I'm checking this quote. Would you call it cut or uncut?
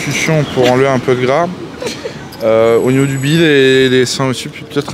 uncut